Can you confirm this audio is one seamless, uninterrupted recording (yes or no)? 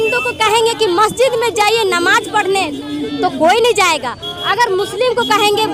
yes